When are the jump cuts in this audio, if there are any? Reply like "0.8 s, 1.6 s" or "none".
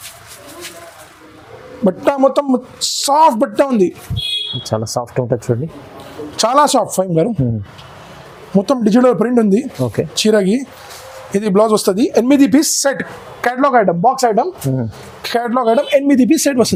none